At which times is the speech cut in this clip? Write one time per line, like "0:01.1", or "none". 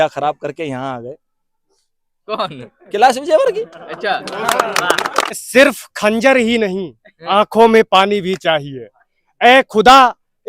0:05.4